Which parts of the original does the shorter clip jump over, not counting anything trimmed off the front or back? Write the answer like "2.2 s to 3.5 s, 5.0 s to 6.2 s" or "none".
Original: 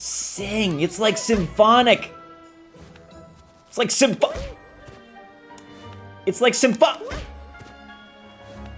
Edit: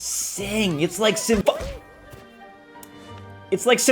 1.4 s to 4.2 s